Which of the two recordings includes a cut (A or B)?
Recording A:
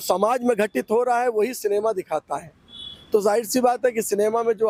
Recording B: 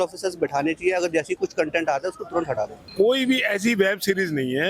B